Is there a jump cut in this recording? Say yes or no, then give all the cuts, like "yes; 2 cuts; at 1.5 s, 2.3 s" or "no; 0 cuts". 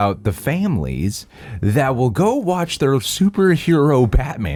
no; 0 cuts